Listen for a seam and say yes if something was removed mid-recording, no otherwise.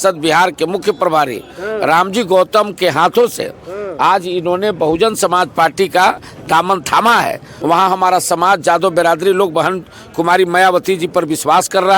yes